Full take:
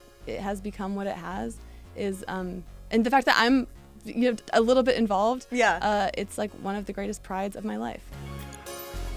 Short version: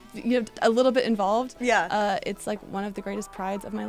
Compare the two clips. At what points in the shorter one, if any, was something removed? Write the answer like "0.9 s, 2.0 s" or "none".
none